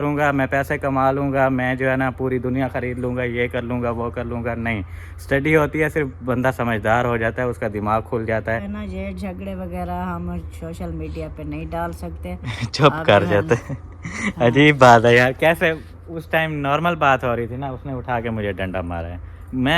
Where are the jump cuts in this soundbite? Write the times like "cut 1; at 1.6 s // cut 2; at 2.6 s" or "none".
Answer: cut 1; at 8.7 s